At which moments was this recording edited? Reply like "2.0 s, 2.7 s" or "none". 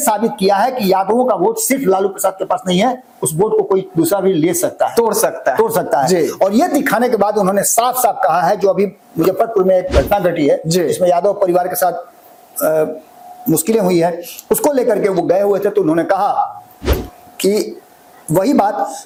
none